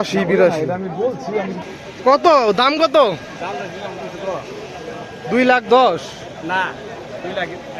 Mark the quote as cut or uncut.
cut